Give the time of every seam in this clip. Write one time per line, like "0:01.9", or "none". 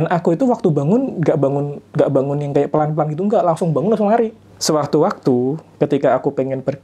0:04.5